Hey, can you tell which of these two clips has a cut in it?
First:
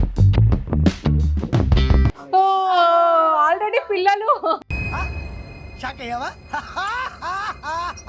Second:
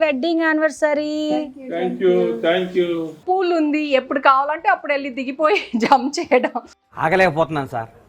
second; 1 cut; at 3.2 s

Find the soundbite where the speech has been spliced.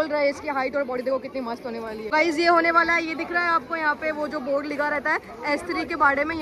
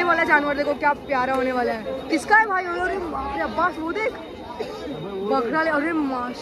first; 1 cut; at 2.1 s

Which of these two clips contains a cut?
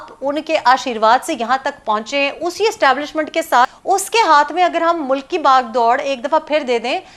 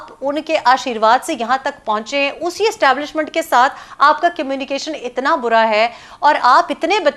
first; 1 cut; at 3.8 s

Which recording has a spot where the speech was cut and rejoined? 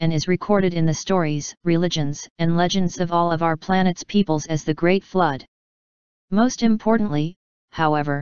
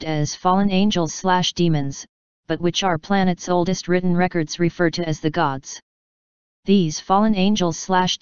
second; 1 cut; at 6.0 s

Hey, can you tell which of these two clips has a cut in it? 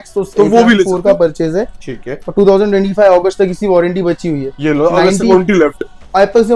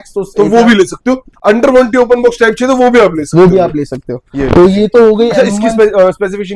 first; 1 cut; at 0.9 s

